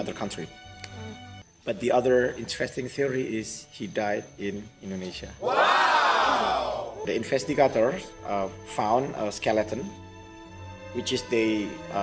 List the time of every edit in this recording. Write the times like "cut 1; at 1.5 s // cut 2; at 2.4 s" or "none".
cut 1; at 1.3 s // cut 2; at 7.0 s